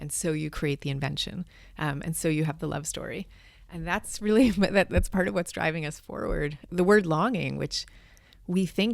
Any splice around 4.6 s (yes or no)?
no